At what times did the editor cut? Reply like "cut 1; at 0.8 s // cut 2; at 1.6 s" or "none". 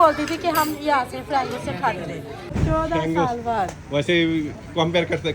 cut 1; at 2.4 s